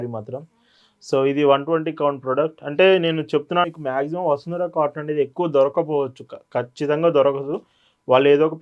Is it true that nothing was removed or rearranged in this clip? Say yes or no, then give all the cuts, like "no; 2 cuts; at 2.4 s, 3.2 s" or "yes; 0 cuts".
no; 1 cut; at 3.7 s